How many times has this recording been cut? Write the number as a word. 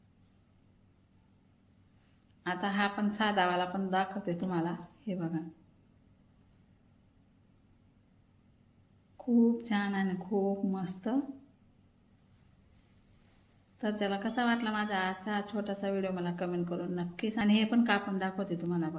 one